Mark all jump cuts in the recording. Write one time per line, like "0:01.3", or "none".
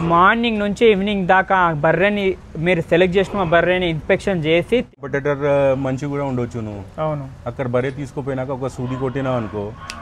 0:04.9